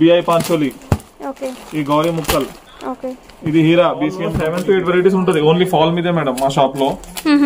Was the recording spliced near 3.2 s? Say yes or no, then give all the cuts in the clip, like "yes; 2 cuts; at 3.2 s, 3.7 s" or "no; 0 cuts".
no; 1 cut; at 4.4 s